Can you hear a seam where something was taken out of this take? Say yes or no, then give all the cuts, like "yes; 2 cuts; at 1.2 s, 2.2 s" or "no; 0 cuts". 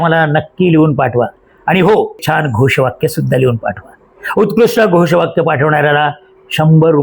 yes; 1 cut; at 2.2 s